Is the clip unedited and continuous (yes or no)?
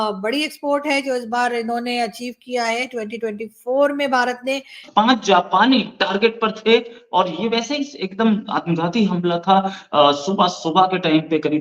no